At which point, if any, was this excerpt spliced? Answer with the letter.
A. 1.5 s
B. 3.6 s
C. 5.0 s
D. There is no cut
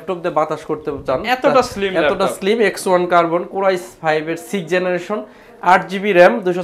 D